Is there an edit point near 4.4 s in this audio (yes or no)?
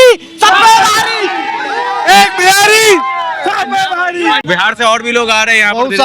yes